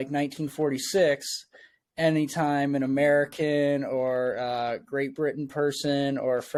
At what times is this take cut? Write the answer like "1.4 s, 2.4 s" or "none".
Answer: none